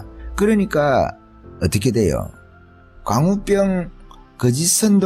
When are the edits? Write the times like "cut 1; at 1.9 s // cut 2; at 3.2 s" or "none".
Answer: none